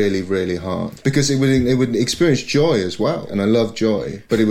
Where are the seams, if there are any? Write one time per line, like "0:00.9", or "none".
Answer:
0:00.9
0:03.3